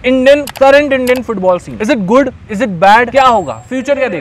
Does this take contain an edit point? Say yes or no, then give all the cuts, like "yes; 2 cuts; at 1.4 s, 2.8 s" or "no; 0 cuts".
no; 0 cuts